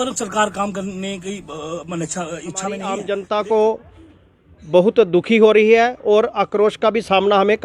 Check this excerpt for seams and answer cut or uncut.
cut